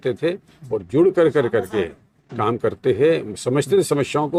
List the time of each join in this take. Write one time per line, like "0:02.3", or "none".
none